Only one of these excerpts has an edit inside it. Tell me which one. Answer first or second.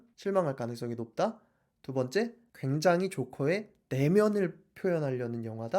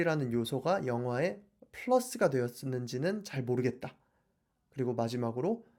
first